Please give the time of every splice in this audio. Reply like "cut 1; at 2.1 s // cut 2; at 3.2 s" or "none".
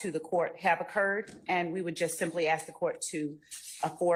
none